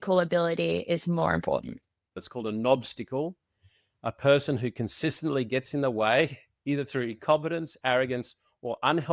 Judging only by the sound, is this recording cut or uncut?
cut